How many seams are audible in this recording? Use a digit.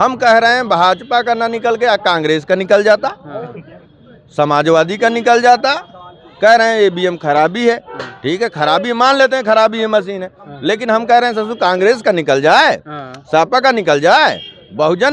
0